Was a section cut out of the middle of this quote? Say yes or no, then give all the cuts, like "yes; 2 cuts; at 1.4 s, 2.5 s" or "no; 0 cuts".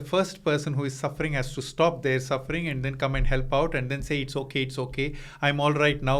no; 0 cuts